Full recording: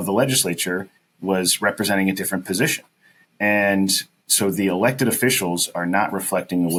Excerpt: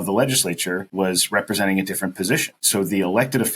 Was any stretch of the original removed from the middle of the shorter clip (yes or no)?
yes